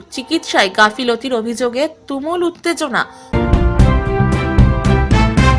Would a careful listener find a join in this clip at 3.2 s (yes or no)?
yes